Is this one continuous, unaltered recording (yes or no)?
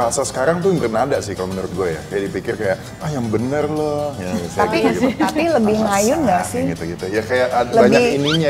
yes